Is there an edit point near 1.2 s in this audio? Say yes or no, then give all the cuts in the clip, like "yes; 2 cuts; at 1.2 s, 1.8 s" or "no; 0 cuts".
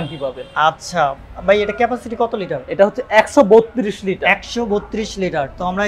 no; 0 cuts